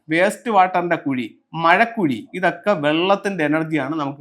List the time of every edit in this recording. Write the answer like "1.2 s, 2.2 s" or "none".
2.3 s